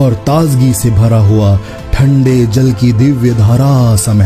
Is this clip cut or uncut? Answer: uncut